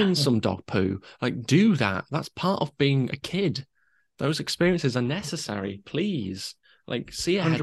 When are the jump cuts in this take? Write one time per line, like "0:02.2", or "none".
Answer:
none